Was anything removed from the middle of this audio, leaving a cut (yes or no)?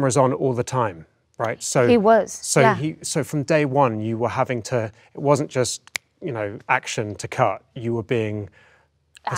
no